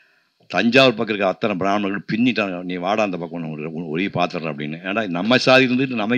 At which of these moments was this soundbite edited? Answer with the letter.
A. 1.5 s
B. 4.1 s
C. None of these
C